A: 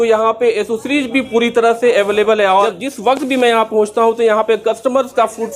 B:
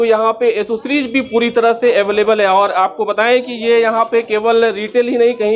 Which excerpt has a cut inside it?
A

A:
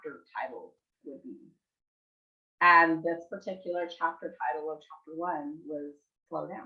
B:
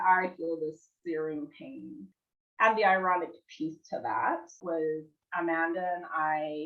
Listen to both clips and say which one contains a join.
B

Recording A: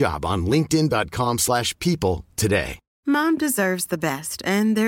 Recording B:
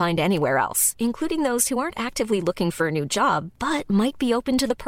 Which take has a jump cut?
A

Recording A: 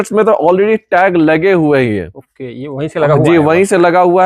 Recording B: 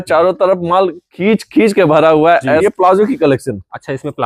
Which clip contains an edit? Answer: B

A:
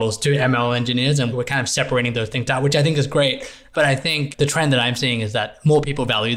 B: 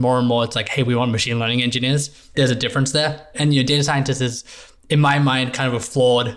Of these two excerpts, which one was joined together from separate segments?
B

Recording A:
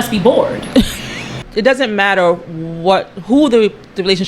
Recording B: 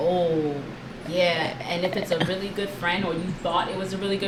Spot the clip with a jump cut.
A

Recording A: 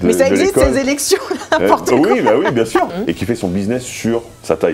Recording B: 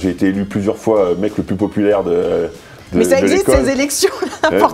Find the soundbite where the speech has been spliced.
A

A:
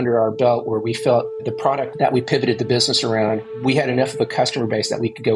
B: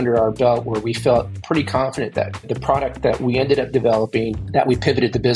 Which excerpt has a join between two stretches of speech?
A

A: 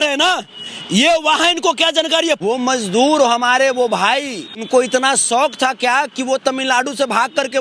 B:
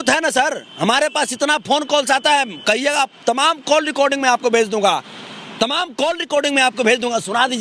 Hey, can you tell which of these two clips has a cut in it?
A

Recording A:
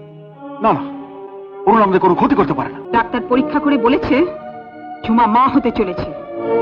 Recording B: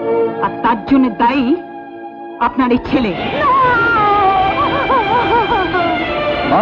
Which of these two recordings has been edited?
A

